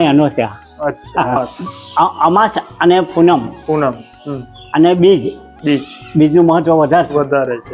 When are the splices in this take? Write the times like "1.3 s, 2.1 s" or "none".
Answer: 1.4 s